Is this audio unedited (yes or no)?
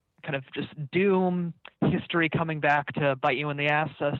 yes